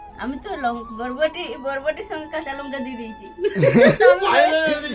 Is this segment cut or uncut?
uncut